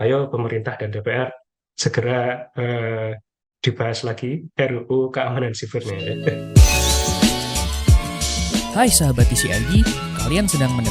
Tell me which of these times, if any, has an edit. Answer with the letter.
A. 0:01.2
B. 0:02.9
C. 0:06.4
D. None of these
C